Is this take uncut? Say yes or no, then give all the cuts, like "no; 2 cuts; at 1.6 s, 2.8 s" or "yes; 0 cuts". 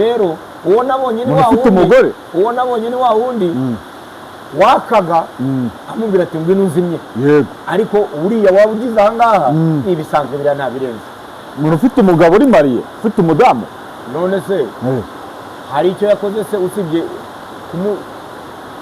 yes; 0 cuts